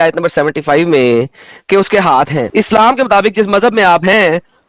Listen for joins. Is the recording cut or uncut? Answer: cut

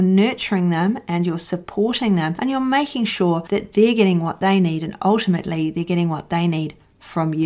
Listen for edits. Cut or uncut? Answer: uncut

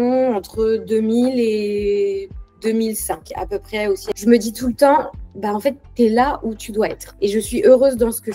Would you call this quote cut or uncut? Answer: cut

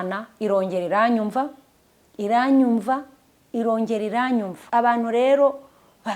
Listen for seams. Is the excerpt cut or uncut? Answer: cut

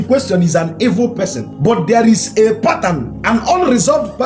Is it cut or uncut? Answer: cut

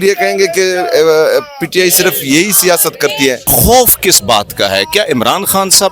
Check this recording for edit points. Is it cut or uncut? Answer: cut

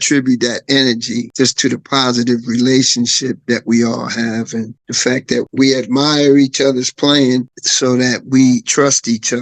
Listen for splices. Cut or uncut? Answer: uncut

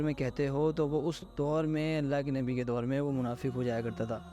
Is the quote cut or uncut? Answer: uncut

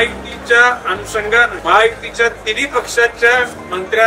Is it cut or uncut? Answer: cut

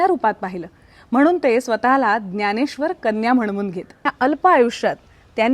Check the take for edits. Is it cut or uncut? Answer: cut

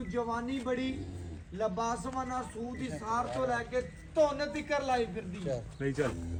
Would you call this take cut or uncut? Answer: uncut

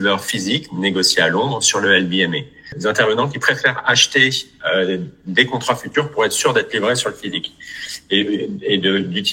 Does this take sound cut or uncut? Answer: cut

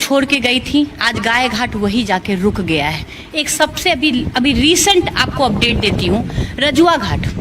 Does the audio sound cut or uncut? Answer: uncut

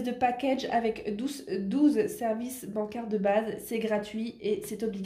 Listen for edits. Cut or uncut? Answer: uncut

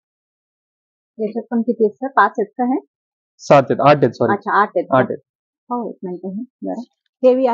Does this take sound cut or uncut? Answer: uncut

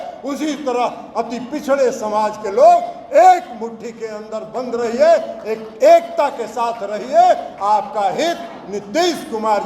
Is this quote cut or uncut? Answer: uncut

